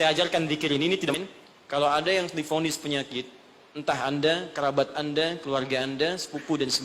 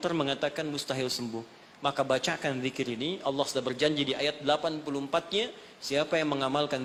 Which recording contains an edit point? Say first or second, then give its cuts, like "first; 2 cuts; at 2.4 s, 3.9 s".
first; 1 cut; at 1.1 s